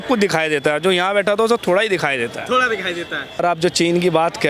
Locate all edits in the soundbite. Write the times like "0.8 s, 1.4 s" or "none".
3.4 s